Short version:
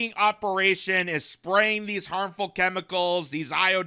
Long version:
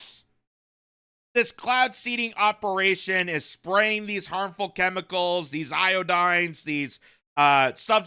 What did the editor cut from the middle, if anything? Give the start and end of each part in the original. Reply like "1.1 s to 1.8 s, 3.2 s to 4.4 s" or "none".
none